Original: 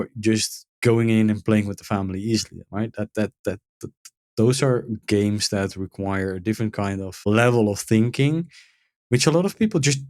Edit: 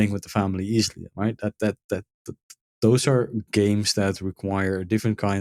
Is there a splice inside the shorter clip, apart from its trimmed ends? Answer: no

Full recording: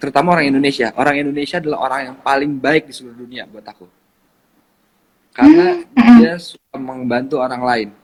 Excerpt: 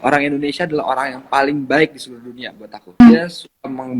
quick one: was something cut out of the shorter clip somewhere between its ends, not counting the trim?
yes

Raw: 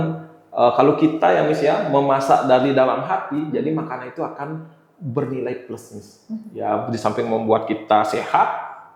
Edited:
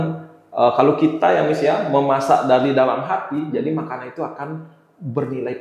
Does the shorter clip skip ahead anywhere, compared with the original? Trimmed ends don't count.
no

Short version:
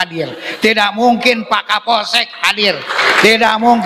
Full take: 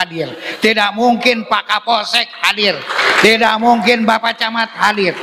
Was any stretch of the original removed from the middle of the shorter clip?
no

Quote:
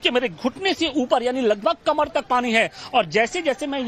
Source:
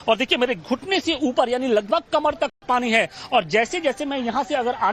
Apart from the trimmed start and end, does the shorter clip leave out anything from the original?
yes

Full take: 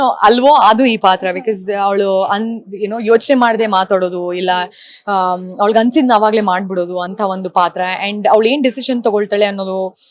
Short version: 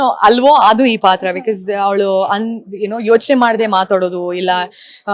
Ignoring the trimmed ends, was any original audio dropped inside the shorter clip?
no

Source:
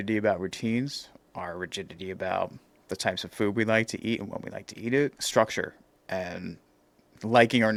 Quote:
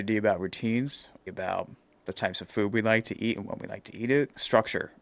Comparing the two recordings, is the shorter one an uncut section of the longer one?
no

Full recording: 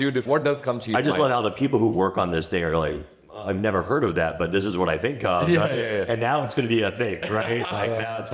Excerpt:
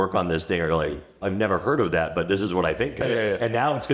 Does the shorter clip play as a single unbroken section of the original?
no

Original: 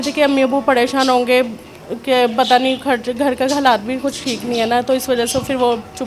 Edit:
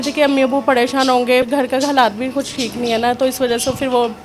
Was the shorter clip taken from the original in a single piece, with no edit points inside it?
no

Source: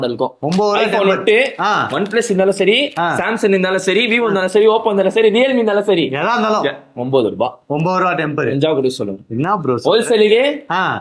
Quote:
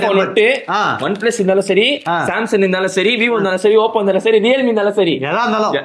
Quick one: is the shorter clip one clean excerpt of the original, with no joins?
yes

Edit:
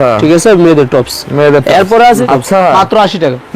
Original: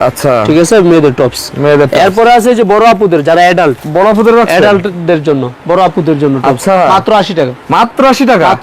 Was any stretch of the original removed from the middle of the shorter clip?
yes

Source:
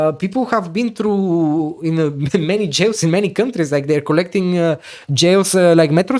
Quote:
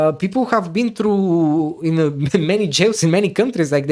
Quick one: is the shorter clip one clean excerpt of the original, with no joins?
yes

